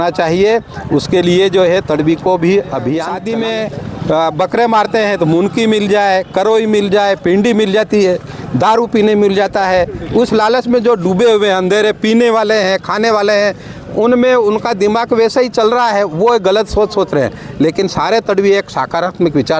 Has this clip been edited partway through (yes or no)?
yes